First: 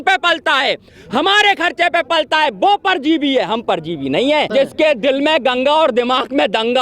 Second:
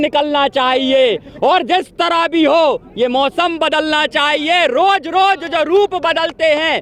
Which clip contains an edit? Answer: first; 1 cut; at 4.5 s

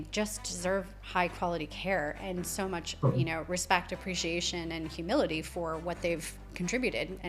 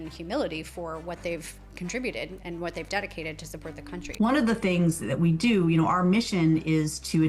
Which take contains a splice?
second; 1 cut; at 4.0 s

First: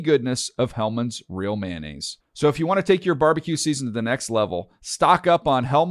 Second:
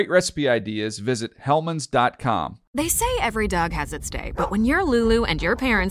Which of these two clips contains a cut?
second; 1 cut; at 2.6 s

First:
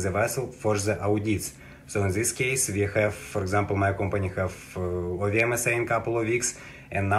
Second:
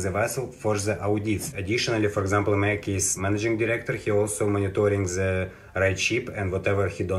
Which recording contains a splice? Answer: second; 2 cuts; at 1.5 s, 3.2 s

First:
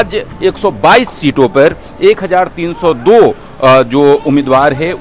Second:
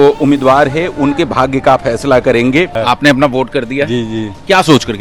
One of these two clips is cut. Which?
second; 1 cut; at 2.8 s

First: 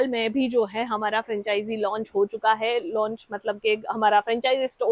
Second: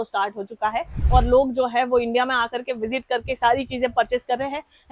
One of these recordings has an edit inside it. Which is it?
second; 1 cut; at 0.9 s

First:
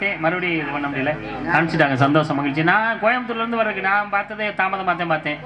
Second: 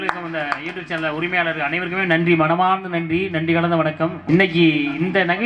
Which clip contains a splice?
second; 1 cut; at 4.2 s

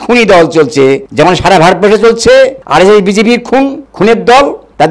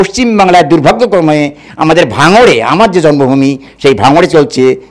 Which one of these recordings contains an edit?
first; 3 cuts; at 1.1 s, 2.6 s, 3.8 s

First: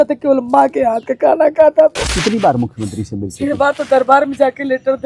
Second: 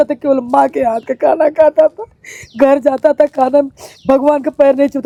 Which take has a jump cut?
first; 1 cut; at 2.1 s

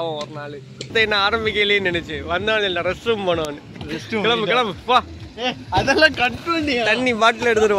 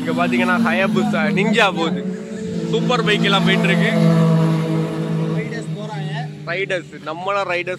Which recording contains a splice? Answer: first; 1 cut; at 0.9 s

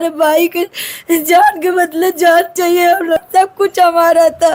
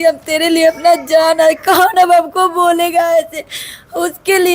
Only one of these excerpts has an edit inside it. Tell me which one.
first; 1 cut; at 3.2 s

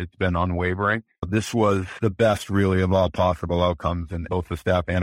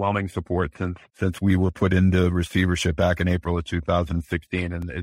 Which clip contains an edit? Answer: first; 3 cuts; at 1.2 s, 1.9 s, 4.2 s

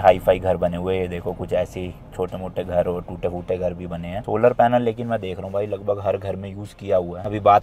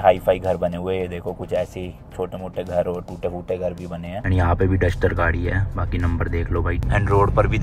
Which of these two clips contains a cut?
second; 2 cuts; at 4.2 s, 6.8 s

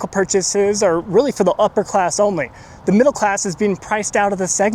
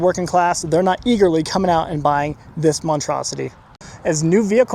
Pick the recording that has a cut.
second; 1 cut; at 3.8 s

